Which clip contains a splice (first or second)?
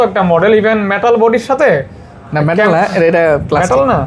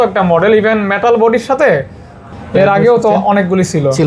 second